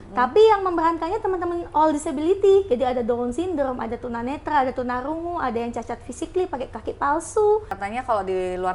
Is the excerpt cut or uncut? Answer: cut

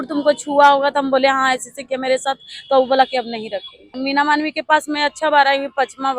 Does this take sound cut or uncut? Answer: cut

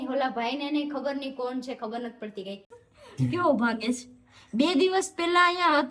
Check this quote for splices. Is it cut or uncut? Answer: cut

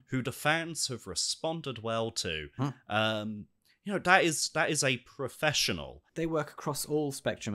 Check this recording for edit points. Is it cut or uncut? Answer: cut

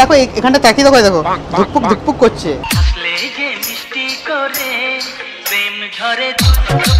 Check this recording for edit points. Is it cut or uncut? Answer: uncut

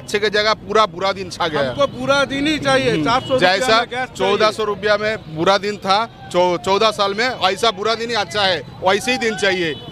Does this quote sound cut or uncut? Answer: uncut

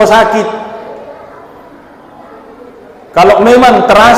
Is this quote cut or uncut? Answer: uncut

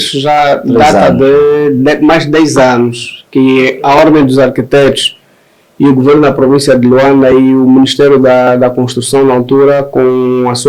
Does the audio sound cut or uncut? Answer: uncut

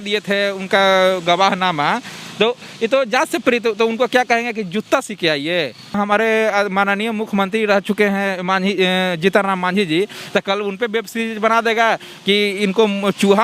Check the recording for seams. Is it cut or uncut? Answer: cut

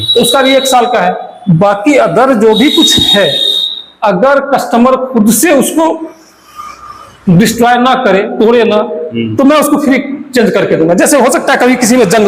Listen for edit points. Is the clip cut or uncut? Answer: uncut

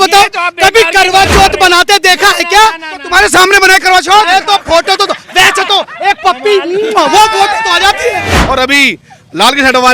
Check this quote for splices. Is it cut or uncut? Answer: cut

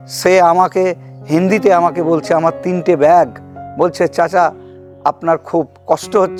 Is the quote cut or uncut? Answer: uncut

